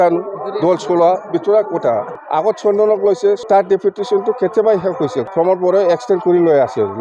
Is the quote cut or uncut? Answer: cut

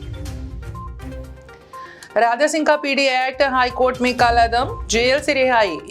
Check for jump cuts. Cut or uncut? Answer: cut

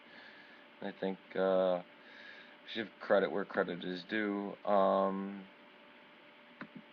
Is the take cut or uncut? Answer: cut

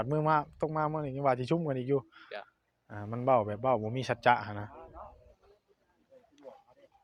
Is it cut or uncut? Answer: uncut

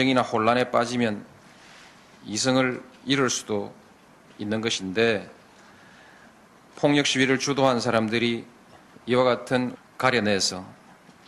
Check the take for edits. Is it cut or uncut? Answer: uncut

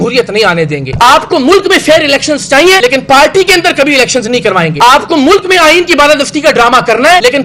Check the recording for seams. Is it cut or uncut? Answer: uncut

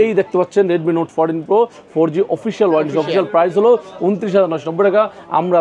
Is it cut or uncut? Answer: uncut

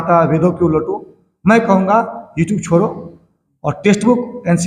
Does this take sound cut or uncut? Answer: uncut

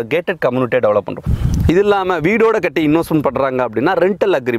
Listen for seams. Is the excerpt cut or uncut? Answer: cut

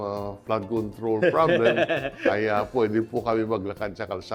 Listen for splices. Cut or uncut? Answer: uncut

